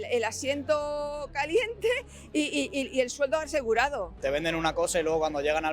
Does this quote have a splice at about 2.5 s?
no; 1 cut; at 4.1 s

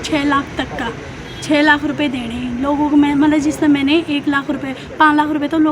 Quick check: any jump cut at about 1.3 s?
no; 0 cuts

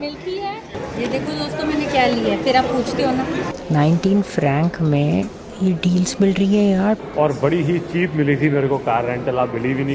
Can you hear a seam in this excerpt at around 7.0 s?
yes; 3 cuts; at 0.8 s, 3.6 s, 7.0 s

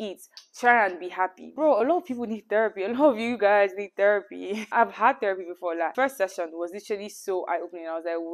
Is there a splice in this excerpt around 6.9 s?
no; 2 cuts; at 1.5 s, 4.6 s

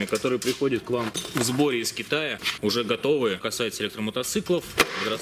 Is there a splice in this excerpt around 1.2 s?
yes; 3 cuts; at 1.2 s, 2.4 s, 3.5 s

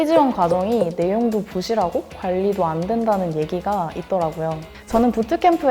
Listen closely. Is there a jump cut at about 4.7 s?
yes; 1 cut; at 4.7 s

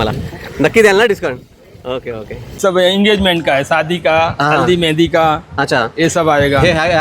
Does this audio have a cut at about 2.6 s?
yes; 1 cut; at 2.6 s

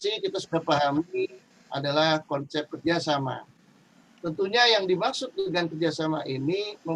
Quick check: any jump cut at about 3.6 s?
no; 0 cuts

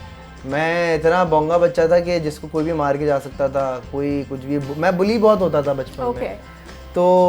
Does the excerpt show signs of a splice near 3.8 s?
no; 0 cuts

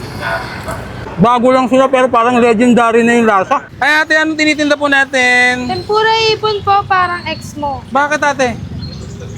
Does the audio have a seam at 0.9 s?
yes; 1 cut; at 0.9 s

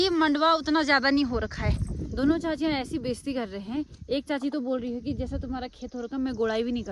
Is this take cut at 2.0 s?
yes; 1 cut; at 2.0 s

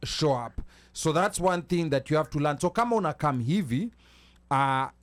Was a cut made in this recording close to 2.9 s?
no; 0 cuts

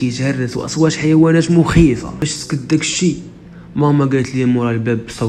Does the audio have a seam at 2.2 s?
yes; 1 cut; at 2.2 s

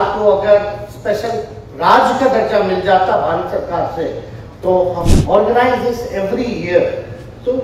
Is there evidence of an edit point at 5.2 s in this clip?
yes; 1 cut; at 5.2 s

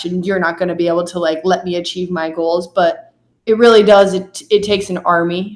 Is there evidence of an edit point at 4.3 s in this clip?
no; 0 cuts

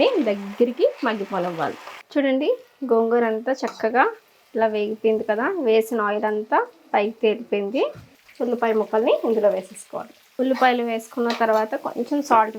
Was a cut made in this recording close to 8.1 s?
yes; 2 cuts; at 2.0 s, 8.1 s

